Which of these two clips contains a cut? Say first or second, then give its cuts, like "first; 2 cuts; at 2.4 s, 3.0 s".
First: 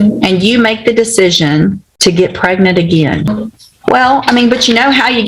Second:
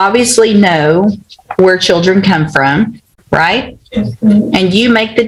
first; 2 cuts; at 1.9 s, 3.2 s